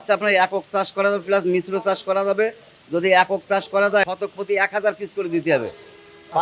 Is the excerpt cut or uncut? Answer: uncut